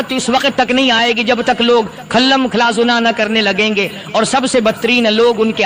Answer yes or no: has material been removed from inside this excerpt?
no